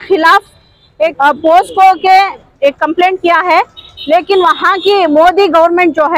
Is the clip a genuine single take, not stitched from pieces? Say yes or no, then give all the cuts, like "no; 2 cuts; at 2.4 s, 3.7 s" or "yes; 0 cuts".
no; 2 cuts; at 1.1 s, 2.5 s